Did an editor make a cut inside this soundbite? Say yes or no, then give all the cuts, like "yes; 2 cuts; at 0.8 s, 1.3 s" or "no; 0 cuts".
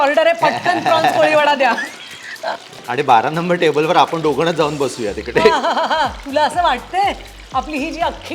yes; 1 cut; at 2.7 s